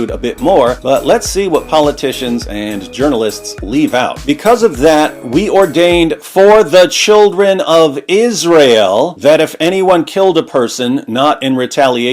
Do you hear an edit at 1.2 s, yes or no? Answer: no